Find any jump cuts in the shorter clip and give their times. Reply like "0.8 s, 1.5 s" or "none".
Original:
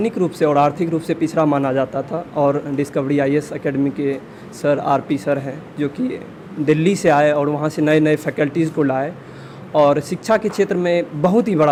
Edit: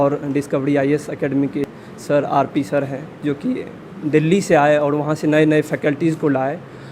1.6 s